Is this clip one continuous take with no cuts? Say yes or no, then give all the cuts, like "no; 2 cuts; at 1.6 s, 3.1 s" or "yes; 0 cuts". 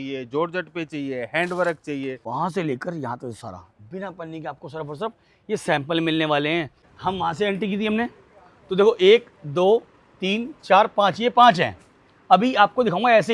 no; 2 cuts; at 2.2 s, 6.9 s